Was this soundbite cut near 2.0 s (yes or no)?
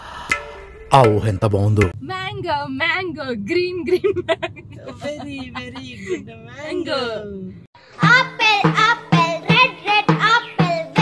yes